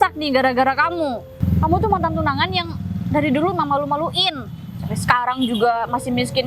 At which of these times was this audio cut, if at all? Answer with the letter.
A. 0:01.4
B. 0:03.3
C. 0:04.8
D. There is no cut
A